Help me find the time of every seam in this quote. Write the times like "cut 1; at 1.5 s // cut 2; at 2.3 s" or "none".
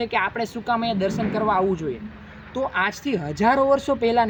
none